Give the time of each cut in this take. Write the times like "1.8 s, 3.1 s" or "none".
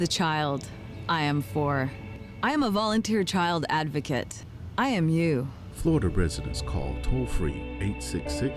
none